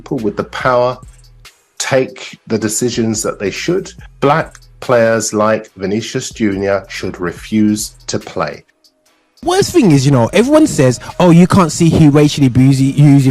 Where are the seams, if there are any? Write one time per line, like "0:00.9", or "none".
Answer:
0:09.4